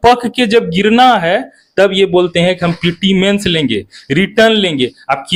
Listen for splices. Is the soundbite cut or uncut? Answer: uncut